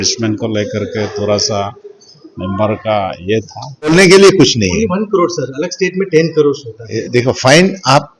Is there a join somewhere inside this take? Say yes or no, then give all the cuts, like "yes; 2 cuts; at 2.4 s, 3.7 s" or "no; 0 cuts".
yes; 2 cuts; at 3.9 s, 7.0 s